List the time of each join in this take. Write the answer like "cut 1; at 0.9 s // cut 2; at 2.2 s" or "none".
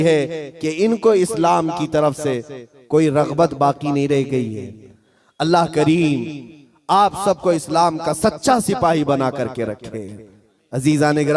none